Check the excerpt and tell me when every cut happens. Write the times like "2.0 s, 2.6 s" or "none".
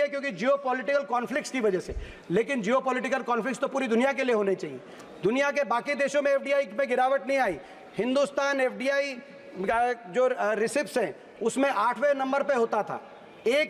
none